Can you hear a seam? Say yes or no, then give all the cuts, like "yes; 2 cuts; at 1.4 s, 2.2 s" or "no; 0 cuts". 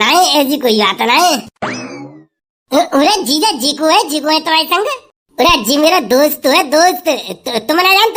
no; 0 cuts